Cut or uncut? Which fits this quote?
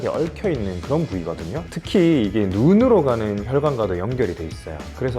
uncut